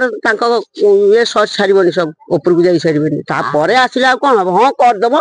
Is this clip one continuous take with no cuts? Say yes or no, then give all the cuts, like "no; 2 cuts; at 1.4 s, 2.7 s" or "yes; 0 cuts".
yes; 0 cuts